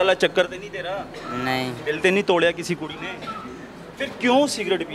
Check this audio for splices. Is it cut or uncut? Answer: uncut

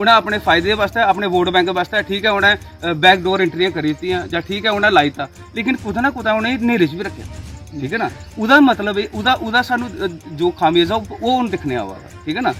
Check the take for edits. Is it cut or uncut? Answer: uncut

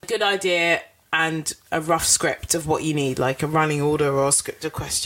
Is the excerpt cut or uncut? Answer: uncut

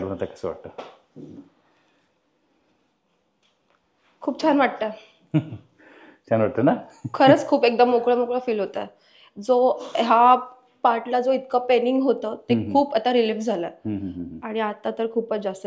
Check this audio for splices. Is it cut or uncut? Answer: uncut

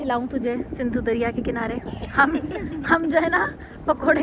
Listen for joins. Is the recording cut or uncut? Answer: uncut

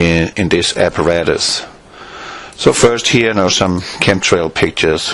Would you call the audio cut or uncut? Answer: uncut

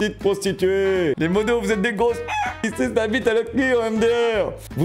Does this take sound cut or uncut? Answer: cut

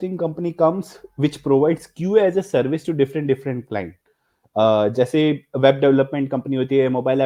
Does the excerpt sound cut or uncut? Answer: uncut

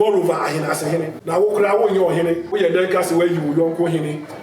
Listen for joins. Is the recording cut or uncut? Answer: cut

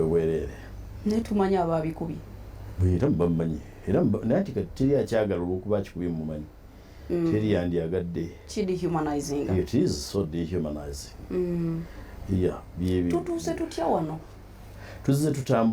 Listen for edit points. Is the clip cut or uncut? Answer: uncut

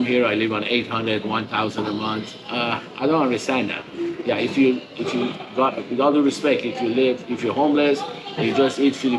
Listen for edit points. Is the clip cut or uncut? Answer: uncut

